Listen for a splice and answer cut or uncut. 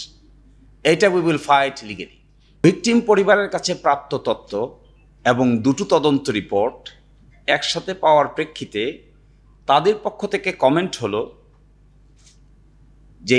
cut